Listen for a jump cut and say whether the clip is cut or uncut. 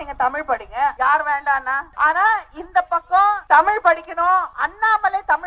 cut